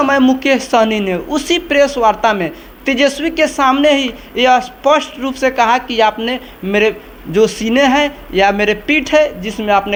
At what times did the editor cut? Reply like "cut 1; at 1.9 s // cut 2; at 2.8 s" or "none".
none